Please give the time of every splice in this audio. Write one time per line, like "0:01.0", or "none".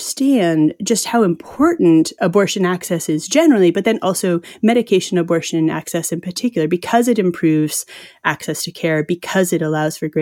none